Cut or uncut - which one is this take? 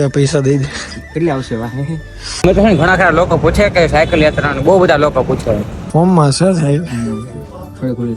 cut